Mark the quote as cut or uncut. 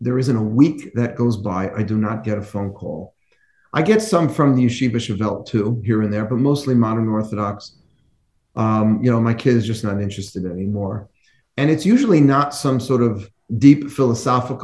uncut